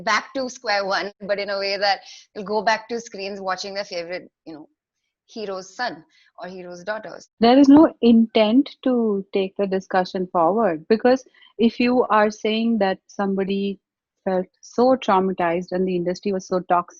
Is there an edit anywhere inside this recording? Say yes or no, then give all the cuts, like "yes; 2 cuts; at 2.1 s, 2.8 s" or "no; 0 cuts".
yes; 2 cuts; at 1.2 s, 7.2 s